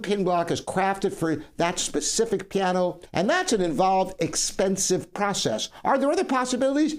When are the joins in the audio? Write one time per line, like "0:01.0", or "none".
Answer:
0:03.0